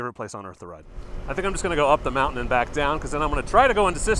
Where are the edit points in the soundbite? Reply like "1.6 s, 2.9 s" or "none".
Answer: 1.2 s